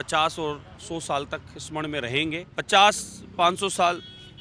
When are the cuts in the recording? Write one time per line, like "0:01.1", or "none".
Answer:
0:02.5